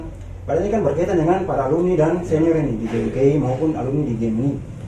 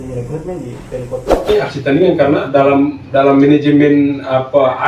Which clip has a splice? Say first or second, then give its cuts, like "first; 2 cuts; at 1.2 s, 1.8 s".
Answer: second; 1 cut; at 1.5 s